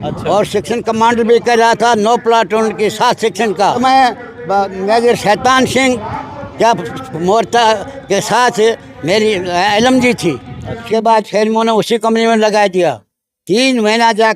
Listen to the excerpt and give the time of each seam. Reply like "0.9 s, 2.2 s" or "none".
3.8 s, 10.9 s